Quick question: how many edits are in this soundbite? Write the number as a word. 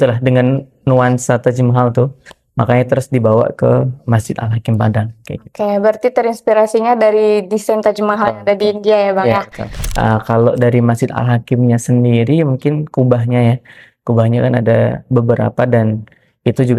zero